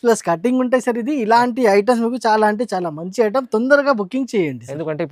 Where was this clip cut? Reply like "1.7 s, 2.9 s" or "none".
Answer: none